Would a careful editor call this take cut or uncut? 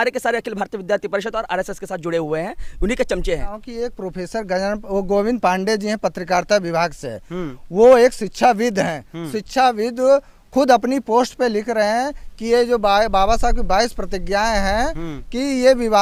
uncut